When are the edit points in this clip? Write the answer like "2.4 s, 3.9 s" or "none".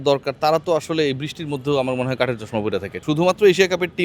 2.9 s